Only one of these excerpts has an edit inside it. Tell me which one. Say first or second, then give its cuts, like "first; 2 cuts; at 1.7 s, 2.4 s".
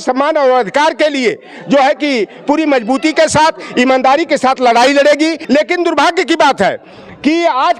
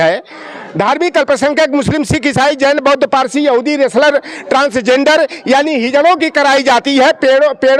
first; 1 cut; at 5.4 s